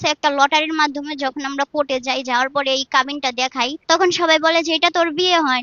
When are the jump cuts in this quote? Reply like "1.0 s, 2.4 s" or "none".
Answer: 3.8 s